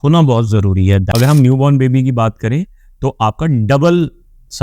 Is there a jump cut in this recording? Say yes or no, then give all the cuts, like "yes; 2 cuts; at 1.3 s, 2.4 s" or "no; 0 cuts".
yes; 1 cut; at 1.1 s